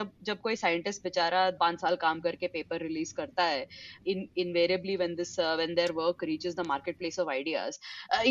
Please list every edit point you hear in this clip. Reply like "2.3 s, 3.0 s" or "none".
1.6 s, 3.9 s